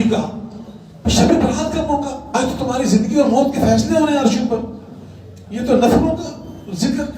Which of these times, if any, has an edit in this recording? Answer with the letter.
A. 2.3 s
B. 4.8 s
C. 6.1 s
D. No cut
A